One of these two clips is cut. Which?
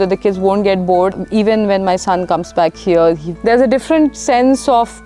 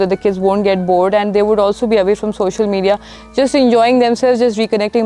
first; 2 cuts; at 1.1 s, 3.3 s

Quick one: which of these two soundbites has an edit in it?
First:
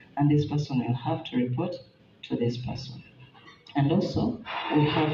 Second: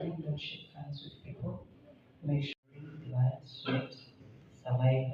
second; 1 cut; at 2.6 s

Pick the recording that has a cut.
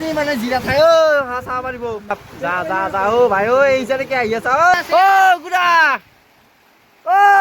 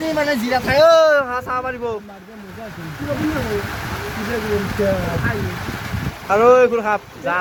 first; 2 cuts; at 2.2 s, 4.7 s

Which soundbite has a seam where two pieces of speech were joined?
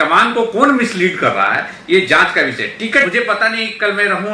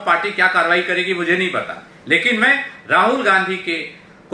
first; 1 cut; at 3.1 s

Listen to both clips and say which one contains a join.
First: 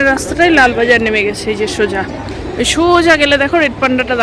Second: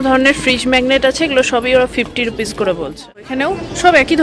second; 1 cut; at 3.1 s

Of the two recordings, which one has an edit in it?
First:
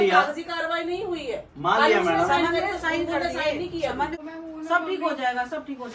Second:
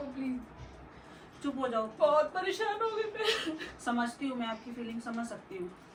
first; 1 cut; at 4.2 s

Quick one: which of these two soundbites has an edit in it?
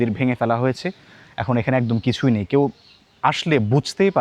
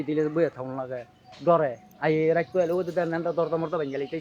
second; 1 cut; at 1.9 s

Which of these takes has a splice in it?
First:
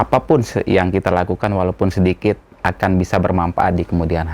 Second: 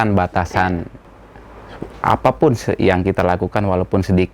second; 1 cut; at 1.0 s

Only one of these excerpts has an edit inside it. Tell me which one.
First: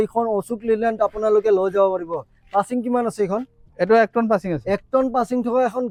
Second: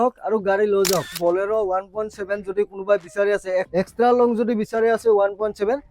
second; 2 cuts; at 1.2 s, 3.7 s

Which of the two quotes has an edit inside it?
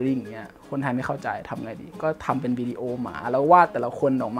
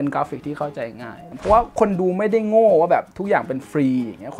second; 1 cut; at 1.3 s

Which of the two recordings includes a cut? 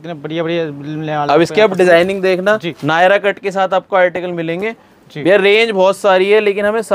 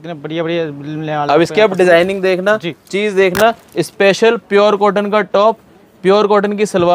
first; 1 cut; at 2.7 s

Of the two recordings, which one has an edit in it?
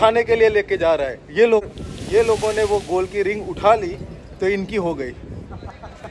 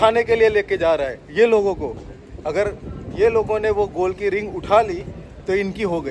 first; 1 cut; at 1.6 s

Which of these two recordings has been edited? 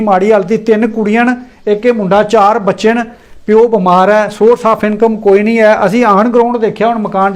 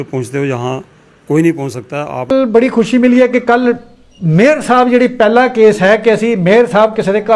second; 1 cut; at 2.3 s

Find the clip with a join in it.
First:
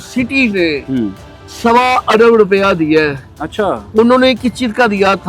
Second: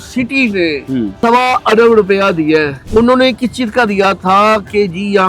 second; 2 cuts; at 1.1 s, 2.8 s

